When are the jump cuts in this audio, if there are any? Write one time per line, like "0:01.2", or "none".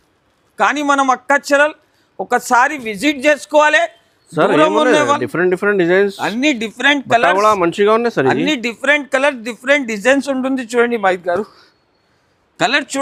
none